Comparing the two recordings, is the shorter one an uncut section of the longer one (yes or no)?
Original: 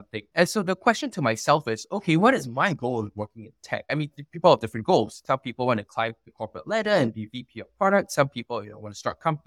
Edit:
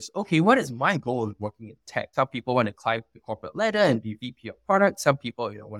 no